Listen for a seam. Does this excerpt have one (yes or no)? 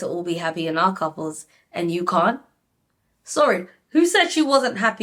no